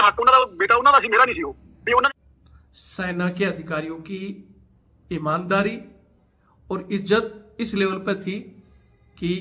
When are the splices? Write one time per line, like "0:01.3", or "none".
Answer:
0:02.1